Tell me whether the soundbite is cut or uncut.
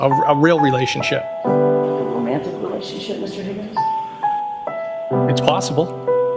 uncut